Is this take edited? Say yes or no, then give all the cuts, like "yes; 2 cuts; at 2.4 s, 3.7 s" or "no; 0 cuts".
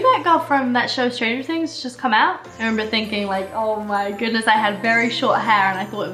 no; 0 cuts